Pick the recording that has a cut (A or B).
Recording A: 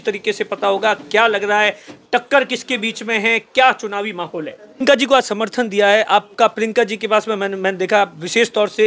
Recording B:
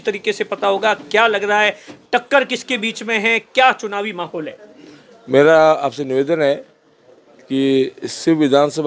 A